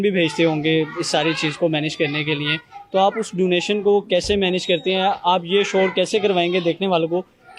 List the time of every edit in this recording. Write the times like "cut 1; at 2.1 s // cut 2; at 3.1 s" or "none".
none